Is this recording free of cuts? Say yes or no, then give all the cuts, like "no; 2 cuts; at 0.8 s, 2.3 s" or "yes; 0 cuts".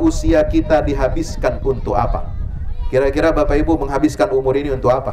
yes; 0 cuts